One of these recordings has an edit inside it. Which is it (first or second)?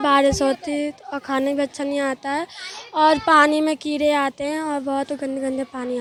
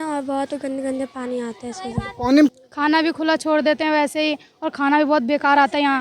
second